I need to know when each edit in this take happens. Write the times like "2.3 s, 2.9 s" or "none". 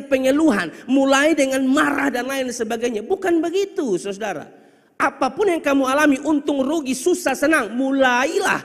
none